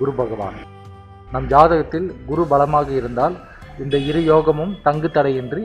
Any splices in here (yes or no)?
no